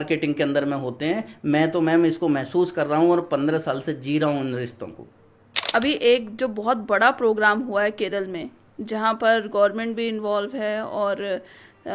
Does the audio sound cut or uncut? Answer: cut